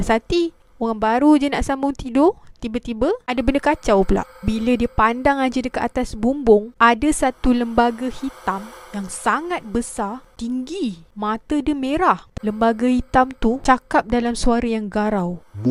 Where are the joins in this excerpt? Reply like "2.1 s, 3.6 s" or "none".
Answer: 3.2 s, 6.7 s, 10.3 s, 11.1 s, 12.3 s, 13.6 s